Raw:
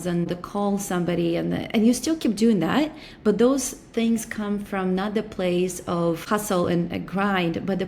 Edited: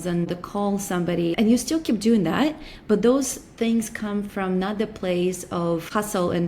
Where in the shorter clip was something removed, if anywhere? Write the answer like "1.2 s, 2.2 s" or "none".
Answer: 1.3 s